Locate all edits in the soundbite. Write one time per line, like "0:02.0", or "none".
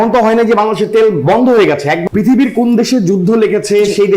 0:02.0